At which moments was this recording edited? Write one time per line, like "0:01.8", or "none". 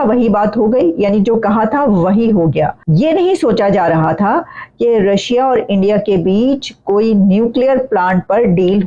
0:02.8